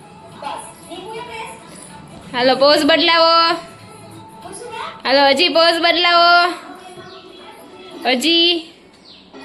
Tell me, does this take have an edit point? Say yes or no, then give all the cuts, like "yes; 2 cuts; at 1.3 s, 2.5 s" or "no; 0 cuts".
no; 0 cuts